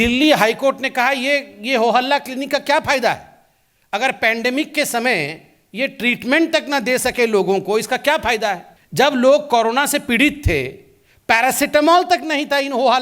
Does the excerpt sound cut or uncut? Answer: cut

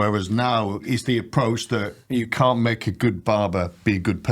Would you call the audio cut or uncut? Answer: cut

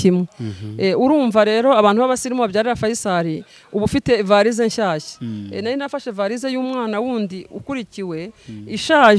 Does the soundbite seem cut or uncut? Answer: uncut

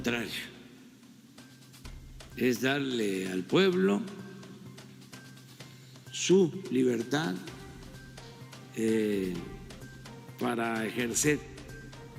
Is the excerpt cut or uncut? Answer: uncut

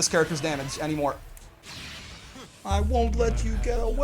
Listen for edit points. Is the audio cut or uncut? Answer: uncut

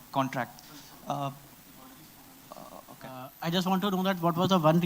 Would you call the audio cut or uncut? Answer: cut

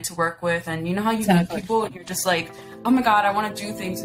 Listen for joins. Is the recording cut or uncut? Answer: uncut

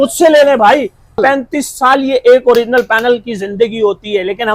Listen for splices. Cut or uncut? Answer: cut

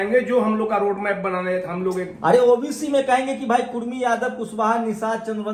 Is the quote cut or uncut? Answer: uncut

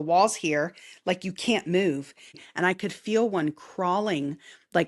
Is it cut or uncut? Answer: cut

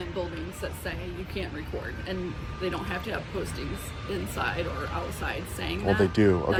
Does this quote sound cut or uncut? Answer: uncut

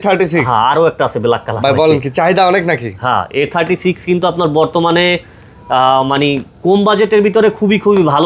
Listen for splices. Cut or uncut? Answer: uncut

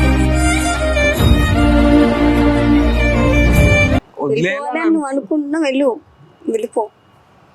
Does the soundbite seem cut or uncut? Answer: cut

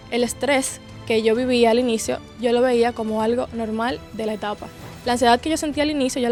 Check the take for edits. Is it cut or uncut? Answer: uncut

